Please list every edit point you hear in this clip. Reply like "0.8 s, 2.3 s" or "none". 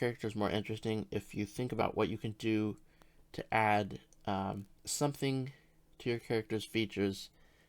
1.8 s